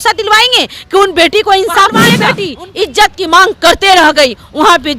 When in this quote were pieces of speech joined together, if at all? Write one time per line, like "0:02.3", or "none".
0:02.1